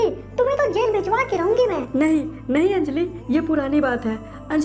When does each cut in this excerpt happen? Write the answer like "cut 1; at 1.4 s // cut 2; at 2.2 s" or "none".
cut 1; at 1.8 s